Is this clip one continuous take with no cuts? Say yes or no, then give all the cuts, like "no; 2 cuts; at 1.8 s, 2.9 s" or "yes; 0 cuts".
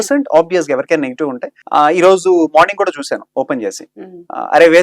no; 1 cut; at 1.5 s